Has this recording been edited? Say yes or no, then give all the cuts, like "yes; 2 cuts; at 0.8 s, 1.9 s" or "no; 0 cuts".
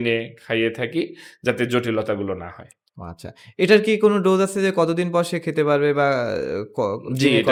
no; 0 cuts